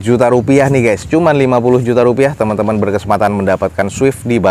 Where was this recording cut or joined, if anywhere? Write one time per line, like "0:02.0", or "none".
none